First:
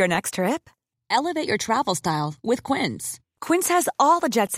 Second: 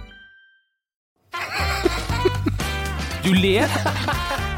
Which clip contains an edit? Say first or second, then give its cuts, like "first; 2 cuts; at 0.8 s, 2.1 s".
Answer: second; 1 cut; at 1.0 s